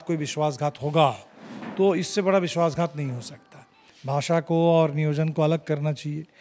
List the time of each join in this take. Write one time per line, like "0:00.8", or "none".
0:03.9